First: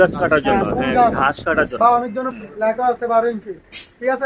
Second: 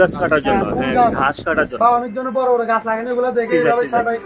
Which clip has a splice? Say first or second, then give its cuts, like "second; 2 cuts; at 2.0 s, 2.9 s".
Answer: first; 1 cut; at 2.3 s